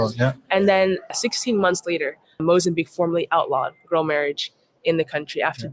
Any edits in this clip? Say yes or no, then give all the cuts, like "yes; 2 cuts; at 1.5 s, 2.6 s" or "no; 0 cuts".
yes; 2 cuts; at 1.1 s, 2.2 s